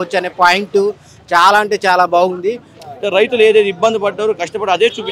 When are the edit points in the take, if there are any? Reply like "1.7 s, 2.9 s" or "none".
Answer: 2.7 s